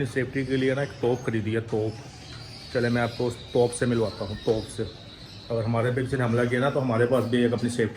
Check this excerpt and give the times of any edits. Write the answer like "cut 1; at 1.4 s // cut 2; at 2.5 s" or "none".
none